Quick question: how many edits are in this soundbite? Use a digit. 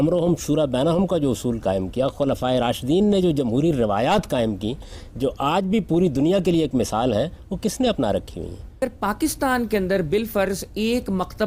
1